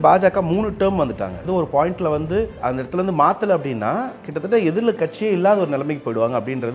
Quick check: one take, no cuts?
no; 2 cuts; at 1.4 s, 2.6 s

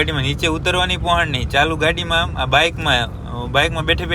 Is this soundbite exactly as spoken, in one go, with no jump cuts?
yes; 0 cuts

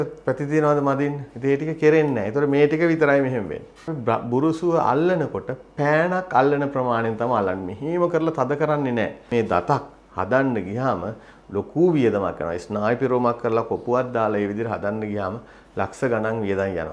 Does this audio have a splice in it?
yes; 2 cuts; at 3.9 s, 9.3 s

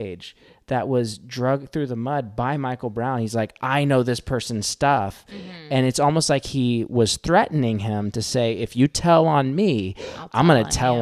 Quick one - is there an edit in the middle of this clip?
no; 0 cuts

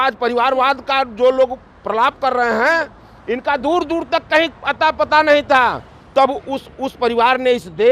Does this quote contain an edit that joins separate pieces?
no; 0 cuts

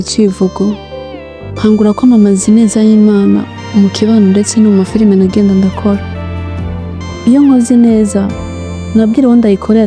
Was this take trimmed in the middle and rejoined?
no; 0 cuts

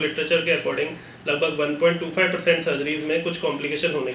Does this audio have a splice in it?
no; 0 cuts

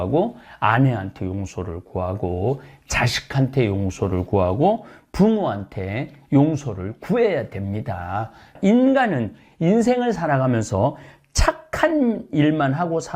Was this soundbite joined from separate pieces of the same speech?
yes; 1 cut; at 8.5 s

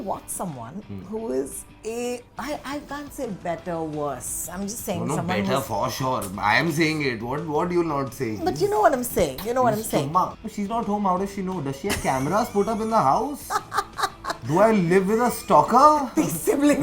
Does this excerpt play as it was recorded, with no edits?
no; 1 cut; at 10.3 s

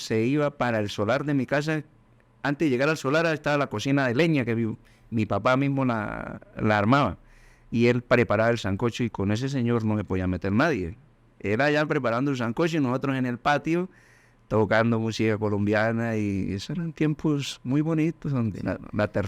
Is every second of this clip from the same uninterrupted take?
yes; 0 cuts

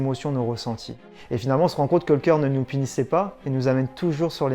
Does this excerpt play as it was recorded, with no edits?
no; 1 cut; at 1.1 s

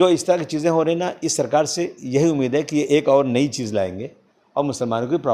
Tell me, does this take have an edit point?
no; 0 cuts

